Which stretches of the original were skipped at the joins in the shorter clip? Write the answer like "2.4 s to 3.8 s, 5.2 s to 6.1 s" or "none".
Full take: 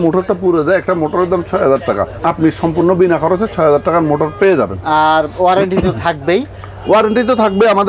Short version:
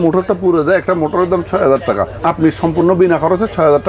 none